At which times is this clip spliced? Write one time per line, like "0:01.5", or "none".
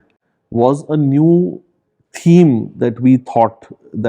none